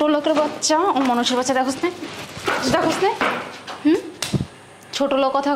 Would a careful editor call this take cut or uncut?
uncut